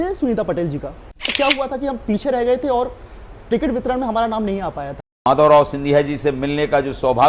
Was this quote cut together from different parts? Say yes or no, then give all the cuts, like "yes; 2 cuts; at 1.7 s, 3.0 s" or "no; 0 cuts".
yes; 2 cuts; at 1.3 s, 5.1 s